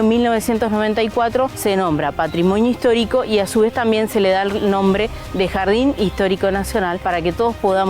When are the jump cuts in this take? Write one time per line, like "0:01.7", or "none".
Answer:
0:01.6
0:07.0